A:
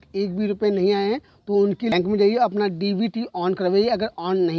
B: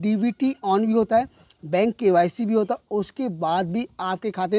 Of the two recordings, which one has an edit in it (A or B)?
A